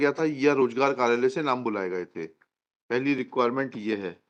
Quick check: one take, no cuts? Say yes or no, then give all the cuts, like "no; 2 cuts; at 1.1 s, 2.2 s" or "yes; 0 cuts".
yes; 0 cuts